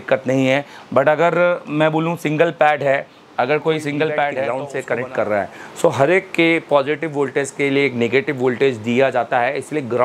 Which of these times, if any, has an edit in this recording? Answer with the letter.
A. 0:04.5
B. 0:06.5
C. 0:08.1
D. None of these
A